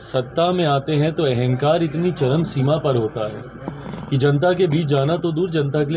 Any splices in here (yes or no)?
no